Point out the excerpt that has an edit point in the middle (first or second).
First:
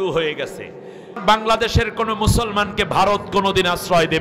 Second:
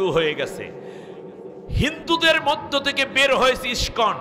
first